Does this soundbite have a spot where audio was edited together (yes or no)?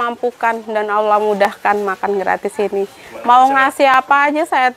yes